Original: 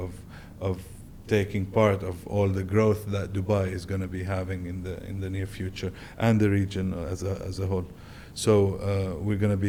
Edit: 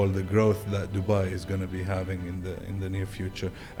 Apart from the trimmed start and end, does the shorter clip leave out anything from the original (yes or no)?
no